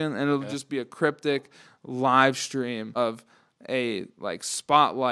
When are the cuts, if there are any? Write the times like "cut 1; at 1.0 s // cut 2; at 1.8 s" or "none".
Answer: cut 1; at 2.9 s